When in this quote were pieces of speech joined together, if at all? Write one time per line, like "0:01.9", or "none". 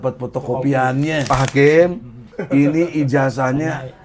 0:01.2

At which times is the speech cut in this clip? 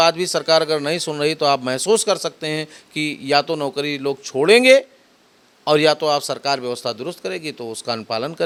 none

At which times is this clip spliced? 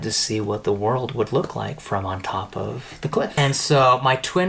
0:03.3

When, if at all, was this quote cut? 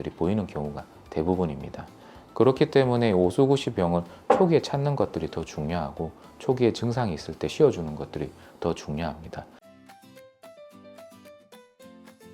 0:09.5

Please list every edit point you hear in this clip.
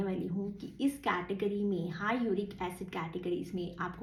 none

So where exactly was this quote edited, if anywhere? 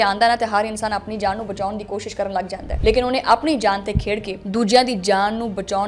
none

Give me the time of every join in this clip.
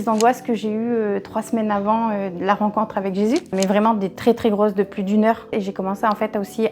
0:03.5
0:05.5

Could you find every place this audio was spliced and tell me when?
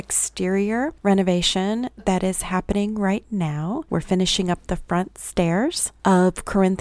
0:03.8
0:05.9

